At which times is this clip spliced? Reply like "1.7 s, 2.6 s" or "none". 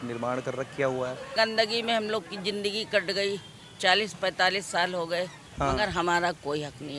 1.4 s, 5.4 s